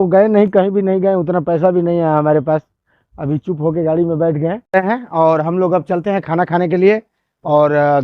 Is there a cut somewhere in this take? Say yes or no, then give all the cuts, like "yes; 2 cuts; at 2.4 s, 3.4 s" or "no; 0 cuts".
yes; 1 cut; at 4.8 s